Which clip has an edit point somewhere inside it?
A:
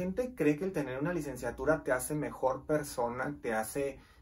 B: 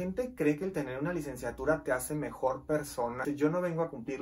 B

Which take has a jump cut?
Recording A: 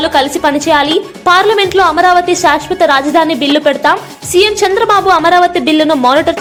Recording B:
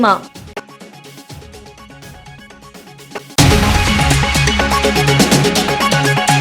B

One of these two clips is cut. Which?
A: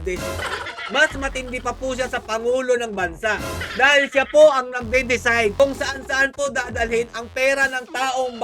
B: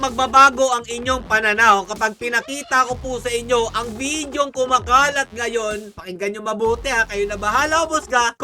B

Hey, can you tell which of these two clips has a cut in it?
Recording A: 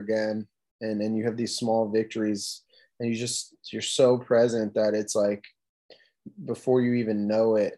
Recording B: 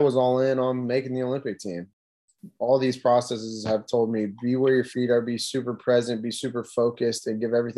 B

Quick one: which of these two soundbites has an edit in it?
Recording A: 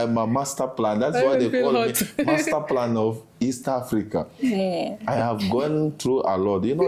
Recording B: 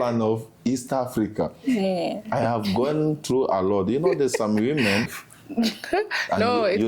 B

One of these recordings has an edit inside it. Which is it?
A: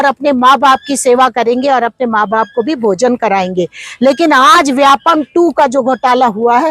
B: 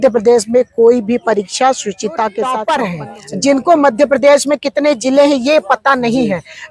B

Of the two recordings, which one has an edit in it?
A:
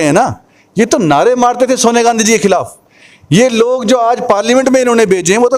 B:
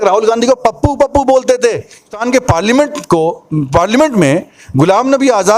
B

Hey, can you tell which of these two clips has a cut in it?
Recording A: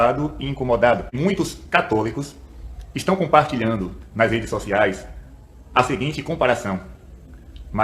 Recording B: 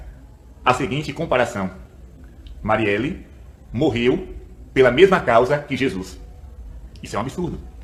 A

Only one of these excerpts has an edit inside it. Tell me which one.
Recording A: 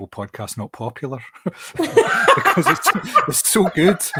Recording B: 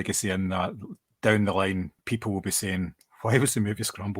B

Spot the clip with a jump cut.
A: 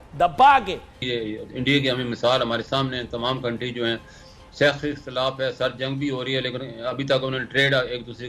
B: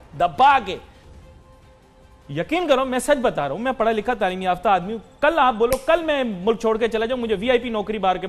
A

